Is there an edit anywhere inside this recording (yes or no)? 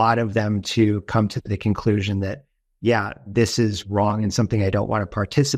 no